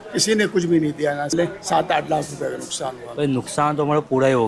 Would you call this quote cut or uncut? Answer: cut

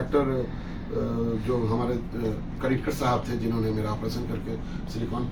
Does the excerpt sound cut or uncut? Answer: uncut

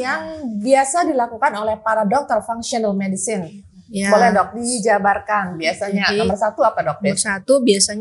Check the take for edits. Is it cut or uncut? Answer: uncut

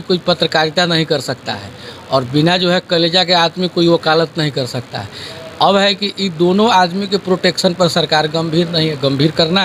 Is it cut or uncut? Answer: uncut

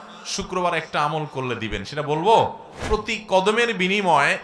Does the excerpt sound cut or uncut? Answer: cut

